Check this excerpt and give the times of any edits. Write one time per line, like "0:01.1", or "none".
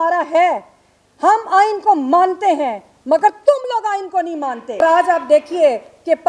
0:04.8